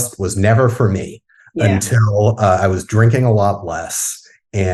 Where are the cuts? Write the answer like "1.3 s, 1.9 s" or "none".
none